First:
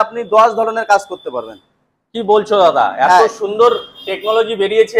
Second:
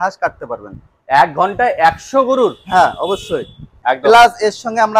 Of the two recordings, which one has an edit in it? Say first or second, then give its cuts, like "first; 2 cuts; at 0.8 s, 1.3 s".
second; 1 cut; at 3.7 s